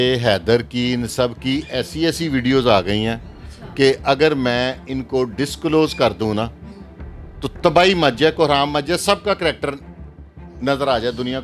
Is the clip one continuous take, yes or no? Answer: yes